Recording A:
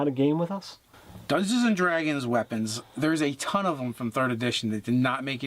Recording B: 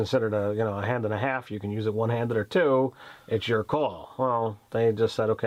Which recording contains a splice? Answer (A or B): A